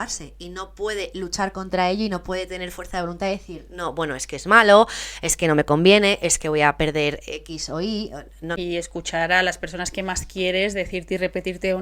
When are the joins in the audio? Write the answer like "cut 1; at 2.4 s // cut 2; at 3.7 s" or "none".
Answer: cut 1; at 8.6 s